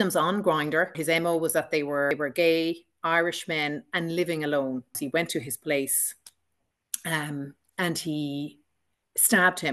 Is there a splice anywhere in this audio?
yes; 3 cuts; at 1.0 s, 2.1 s, 4.9 s

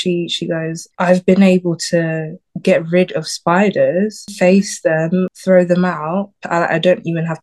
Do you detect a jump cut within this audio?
yes; 4 cuts; at 0.9 s, 4.2 s, 5.3 s, 6.4 s

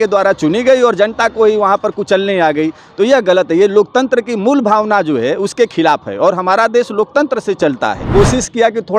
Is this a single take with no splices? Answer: no; 1 cut; at 8.0 s

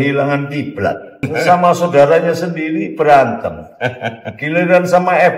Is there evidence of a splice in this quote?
yes; 1 cut; at 1.2 s

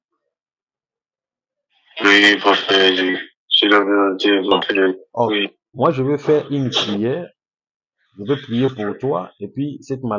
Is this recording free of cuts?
no; 1 cut; at 5.3 s

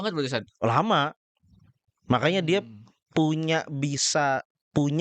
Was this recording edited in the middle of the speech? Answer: no; 0 cuts

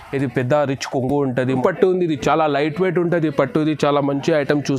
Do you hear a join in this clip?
yes; 1 cut; at 1.5 s

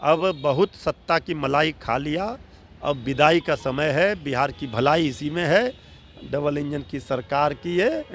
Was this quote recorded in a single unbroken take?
yes; 0 cuts

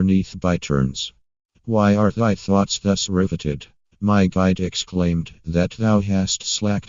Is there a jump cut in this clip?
yes; 1 cut; at 3.3 s

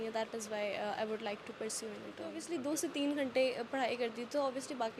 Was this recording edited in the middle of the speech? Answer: yes; 1 cut; at 2.4 s

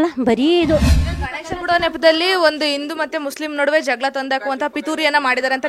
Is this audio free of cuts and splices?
no; 1 cut; at 1.0 s

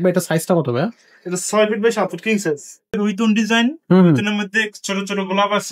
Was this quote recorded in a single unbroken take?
no; 1 cut; at 2.9 s

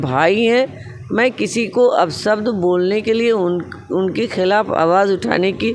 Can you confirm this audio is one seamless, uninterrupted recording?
yes; 0 cuts

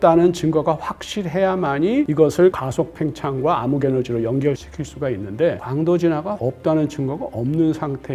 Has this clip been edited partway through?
no; 0 cuts

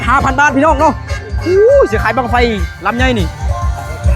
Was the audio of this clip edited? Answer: no; 0 cuts

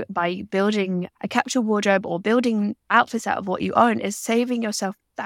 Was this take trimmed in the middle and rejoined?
no; 0 cuts

